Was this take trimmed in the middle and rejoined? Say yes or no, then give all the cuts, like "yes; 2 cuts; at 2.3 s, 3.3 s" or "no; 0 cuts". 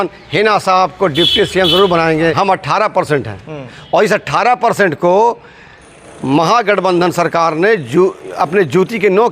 yes; 1 cut; at 2.4 s